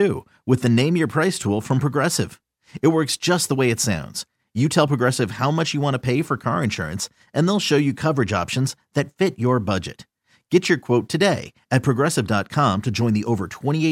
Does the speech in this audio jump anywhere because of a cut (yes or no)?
no